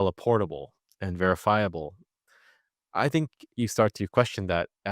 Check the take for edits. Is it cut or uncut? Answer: cut